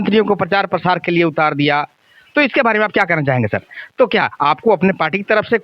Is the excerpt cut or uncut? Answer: cut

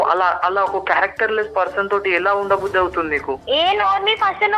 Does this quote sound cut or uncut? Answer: cut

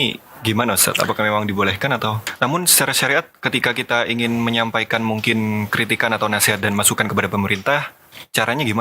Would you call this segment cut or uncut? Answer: cut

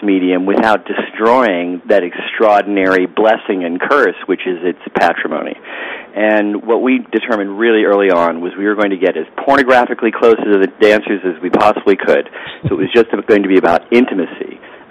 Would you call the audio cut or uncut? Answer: cut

